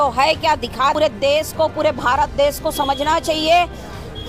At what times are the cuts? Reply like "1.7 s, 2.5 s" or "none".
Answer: 0.9 s